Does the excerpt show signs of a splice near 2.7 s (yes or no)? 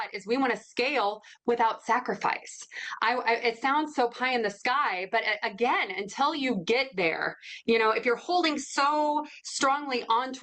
no